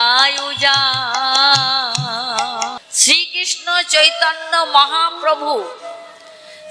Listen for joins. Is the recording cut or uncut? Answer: cut